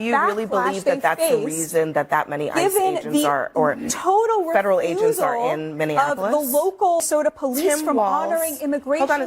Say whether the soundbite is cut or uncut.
cut